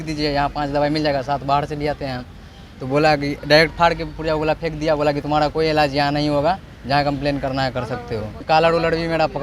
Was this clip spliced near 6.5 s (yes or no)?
no